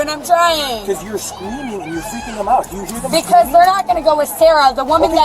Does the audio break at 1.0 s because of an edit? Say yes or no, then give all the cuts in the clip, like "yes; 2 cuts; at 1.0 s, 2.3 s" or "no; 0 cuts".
yes; 1 cut; at 1.0 s